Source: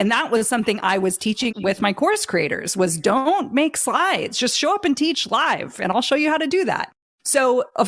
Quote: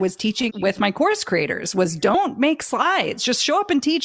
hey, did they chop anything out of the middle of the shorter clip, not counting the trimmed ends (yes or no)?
yes